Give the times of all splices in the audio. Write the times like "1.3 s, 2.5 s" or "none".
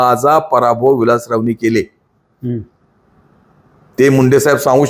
none